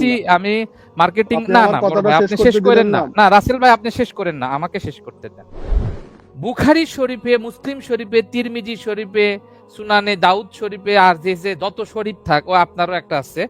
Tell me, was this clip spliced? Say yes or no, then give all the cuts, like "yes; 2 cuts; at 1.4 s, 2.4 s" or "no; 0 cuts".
yes; 1 cut; at 5.9 s